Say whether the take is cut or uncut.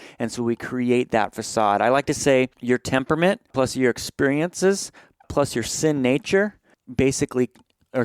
cut